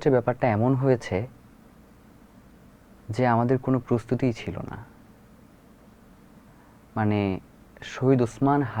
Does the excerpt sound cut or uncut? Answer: uncut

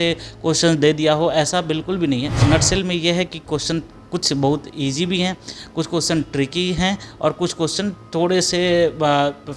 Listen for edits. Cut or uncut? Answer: cut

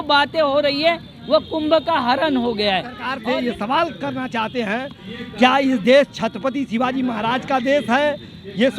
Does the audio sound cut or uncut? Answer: cut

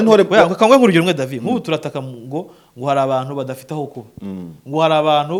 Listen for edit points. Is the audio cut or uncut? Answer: uncut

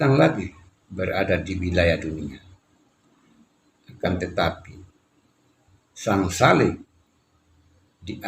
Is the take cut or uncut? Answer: uncut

